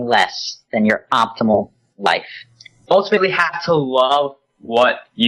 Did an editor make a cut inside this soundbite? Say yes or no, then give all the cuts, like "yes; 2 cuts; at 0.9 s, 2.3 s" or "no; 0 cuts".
yes; 1 cut; at 2.8 s